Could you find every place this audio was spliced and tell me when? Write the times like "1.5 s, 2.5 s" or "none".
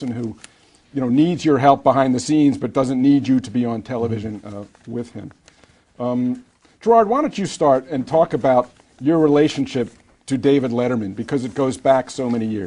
5.1 s